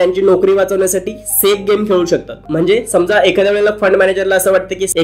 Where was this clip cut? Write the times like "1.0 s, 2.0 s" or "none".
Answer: none